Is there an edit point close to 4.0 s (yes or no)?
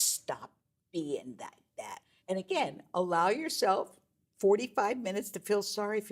no